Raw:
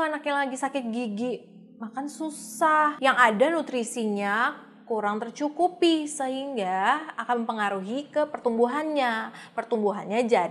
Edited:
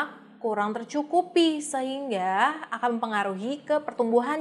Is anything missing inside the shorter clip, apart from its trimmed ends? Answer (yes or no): no